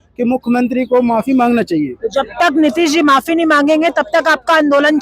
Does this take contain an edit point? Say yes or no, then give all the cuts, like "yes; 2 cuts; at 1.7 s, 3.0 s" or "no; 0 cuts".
yes; 1 cut; at 2.0 s